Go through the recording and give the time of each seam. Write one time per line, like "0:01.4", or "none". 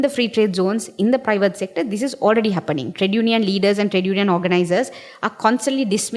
none

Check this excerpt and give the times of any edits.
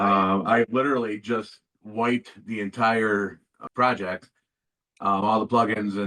0:03.5

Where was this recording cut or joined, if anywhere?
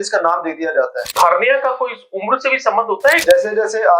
0:01.2
0:03.2

